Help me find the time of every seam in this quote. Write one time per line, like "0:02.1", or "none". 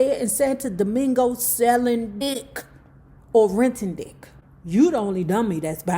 0:02.2